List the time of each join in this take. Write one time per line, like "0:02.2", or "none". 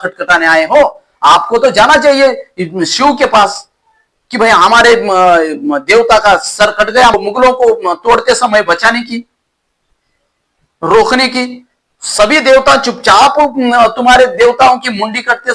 0:07.2